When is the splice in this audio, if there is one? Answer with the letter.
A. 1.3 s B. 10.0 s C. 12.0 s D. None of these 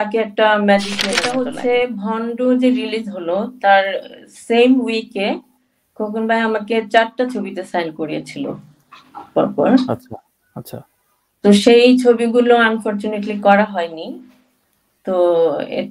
A